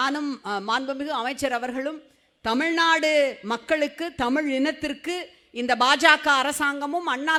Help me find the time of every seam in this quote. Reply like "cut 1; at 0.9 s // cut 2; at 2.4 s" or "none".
none